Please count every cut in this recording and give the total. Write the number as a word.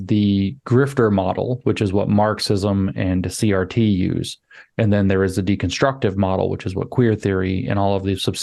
zero